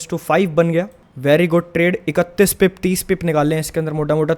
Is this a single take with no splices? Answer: no; 1 cut; at 1.0 s

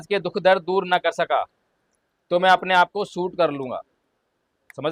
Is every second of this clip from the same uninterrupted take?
yes; 0 cuts

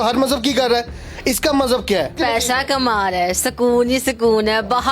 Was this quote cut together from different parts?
yes; 1 cut; at 2.2 s

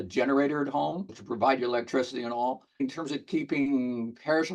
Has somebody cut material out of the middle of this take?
no; 0 cuts

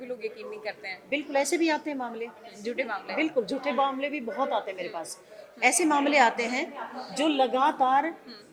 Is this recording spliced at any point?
no; 0 cuts

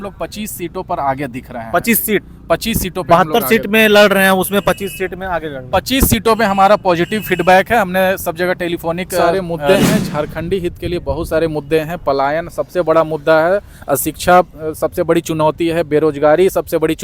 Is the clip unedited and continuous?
no; 1 cut; at 9.3 s

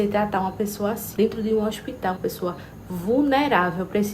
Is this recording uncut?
no; 2 cuts; at 1.0 s, 2.2 s

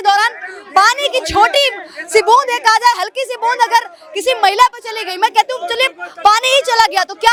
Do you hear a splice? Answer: no; 0 cuts

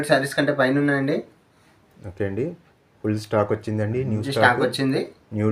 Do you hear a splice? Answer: no; 0 cuts

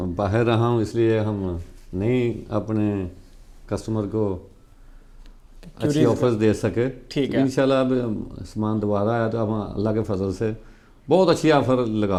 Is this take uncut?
yes; 0 cuts

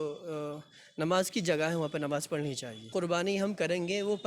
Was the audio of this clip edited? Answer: yes; 1 cut; at 2.9 s

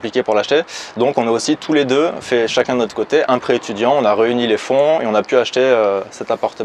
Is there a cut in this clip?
no; 0 cuts

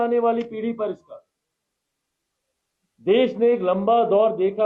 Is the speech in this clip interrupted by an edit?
no; 0 cuts

